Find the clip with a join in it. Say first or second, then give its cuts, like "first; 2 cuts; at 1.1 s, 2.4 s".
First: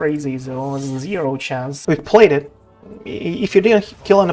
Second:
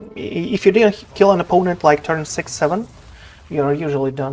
first; 1 cut; at 1.8 s